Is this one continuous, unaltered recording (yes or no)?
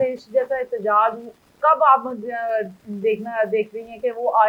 yes